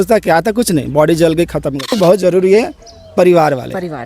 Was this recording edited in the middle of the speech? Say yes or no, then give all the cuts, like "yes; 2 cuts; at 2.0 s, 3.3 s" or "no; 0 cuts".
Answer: yes; 1 cut; at 2.0 s